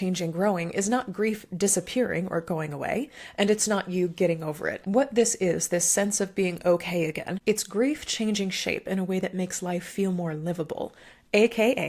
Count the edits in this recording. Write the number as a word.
two